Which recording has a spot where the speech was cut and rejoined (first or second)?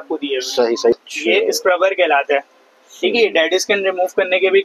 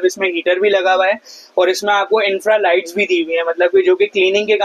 first